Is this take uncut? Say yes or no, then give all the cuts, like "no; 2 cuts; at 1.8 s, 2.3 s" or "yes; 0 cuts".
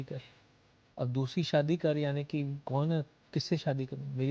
yes; 0 cuts